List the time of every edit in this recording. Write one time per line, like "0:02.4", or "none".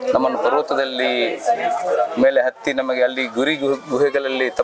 none